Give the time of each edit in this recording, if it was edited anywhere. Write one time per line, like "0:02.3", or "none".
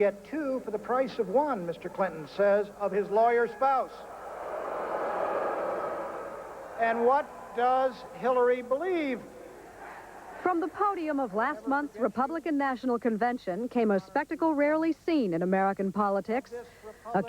0:15.3